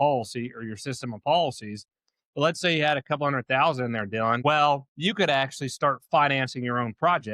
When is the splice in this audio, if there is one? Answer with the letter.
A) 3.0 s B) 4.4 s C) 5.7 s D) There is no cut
B